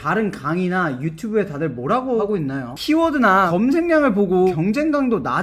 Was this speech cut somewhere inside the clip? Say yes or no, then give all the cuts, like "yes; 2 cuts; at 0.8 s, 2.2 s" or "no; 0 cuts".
yes; 3 cuts; at 2.2 s, 3.5 s, 4.5 s